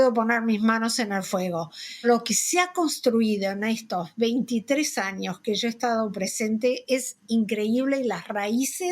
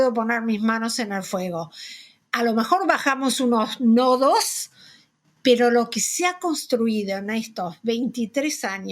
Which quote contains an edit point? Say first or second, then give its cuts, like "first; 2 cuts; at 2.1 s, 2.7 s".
first; 1 cut; at 2.0 s